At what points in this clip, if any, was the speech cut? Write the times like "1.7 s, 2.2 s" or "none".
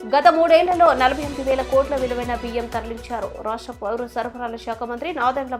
none